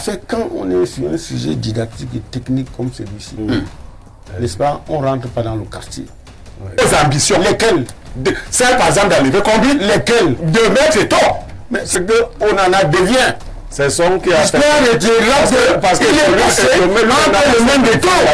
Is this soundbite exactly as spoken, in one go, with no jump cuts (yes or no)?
no